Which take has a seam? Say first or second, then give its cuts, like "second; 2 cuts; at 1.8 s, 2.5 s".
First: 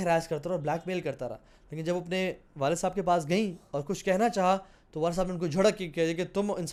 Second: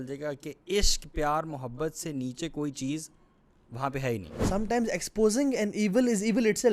second; 1 cut; at 4.5 s